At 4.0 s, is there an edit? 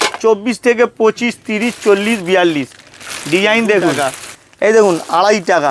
yes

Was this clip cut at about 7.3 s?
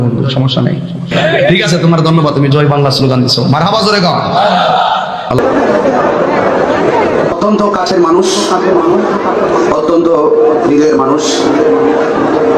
yes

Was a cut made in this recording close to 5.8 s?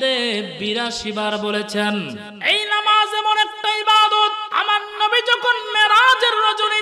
no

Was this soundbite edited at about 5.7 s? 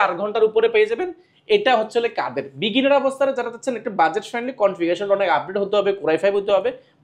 no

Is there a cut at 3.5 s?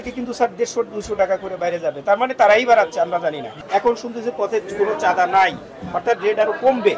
yes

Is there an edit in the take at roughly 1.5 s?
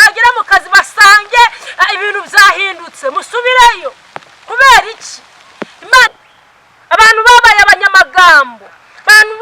no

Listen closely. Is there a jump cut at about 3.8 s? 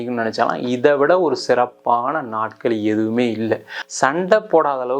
yes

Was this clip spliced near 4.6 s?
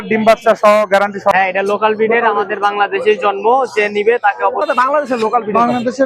yes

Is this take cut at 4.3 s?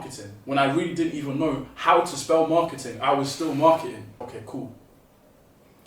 yes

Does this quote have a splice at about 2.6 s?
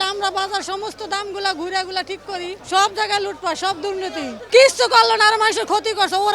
yes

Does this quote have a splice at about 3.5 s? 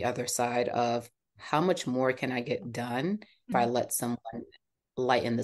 yes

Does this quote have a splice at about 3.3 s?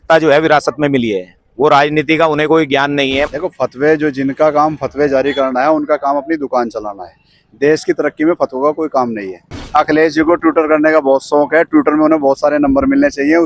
yes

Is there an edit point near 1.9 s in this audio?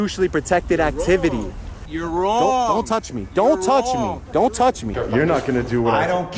yes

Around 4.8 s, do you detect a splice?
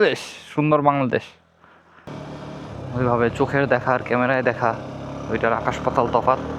no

